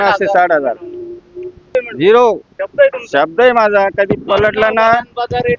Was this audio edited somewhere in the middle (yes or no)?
yes